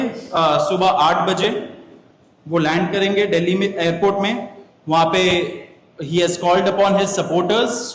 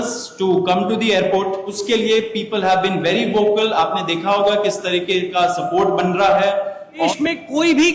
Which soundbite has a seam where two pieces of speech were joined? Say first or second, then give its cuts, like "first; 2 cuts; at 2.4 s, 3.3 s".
second; 2 cuts; at 1.8 s, 7.1 s